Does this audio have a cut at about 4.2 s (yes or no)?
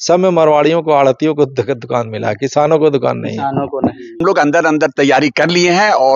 yes